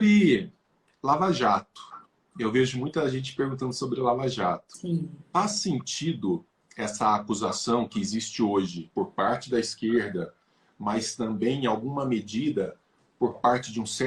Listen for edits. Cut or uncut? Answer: cut